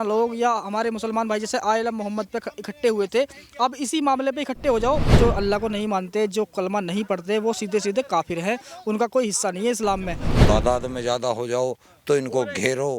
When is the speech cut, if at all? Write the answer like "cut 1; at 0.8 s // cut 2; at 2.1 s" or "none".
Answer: cut 1; at 5.1 s // cut 2; at 10.3 s